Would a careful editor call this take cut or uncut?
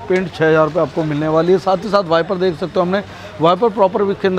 uncut